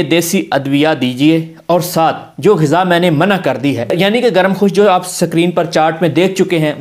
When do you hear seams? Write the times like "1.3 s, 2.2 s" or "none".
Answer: none